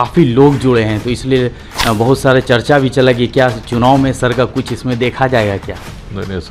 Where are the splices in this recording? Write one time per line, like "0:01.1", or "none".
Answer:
none